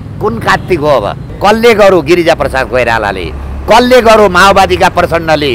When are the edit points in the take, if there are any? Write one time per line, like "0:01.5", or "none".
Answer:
0:01.2